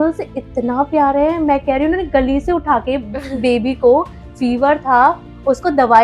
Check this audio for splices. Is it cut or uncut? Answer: uncut